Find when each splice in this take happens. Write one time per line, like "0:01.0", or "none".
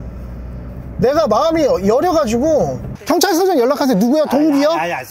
0:02.9